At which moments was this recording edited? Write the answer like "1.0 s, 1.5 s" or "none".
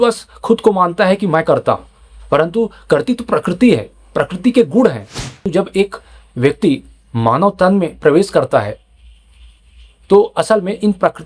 5.5 s